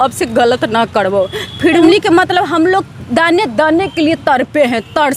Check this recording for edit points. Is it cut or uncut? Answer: cut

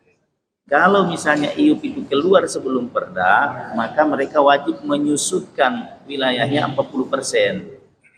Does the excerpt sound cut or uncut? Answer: uncut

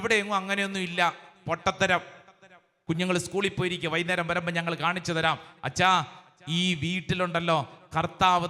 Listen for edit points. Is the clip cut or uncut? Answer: cut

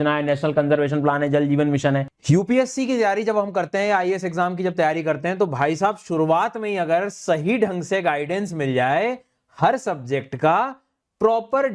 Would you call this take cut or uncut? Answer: cut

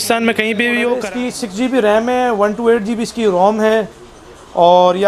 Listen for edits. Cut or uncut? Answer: cut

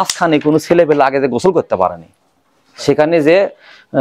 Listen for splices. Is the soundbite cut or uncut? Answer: uncut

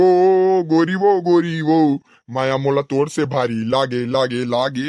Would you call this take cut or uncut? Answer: uncut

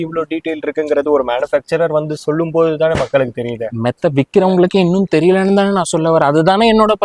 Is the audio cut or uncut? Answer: uncut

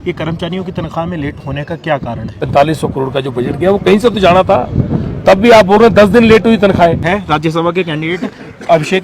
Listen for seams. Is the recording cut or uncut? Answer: cut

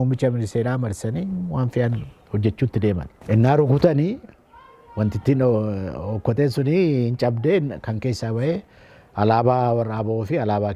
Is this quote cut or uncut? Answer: cut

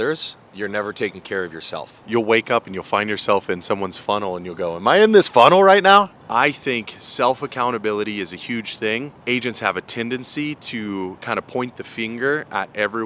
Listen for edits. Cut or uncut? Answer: cut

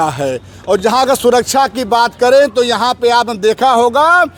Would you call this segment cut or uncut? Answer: uncut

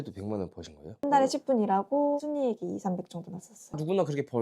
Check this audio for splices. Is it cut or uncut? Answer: cut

